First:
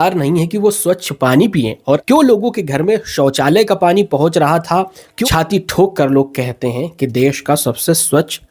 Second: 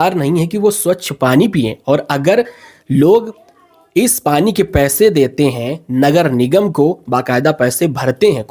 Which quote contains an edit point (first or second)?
first